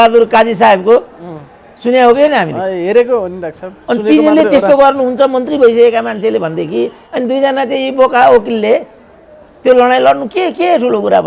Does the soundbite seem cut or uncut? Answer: uncut